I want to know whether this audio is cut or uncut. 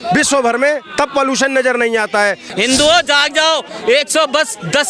cut